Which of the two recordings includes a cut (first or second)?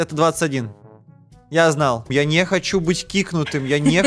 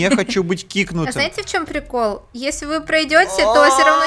first